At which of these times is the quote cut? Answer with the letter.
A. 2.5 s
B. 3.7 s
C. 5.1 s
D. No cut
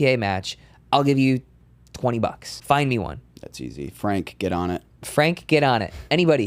A